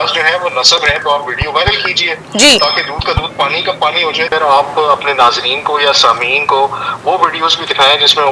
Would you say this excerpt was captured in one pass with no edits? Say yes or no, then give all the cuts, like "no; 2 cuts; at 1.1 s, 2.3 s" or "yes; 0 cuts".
no; 2 cuts; at 1.0 s, 4.3 s